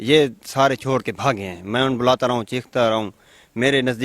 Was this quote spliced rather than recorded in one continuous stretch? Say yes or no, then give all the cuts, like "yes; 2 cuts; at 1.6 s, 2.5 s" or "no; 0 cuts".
no; 0 cuts